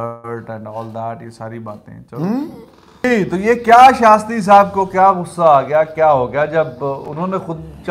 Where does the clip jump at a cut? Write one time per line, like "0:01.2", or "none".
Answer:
0:02.8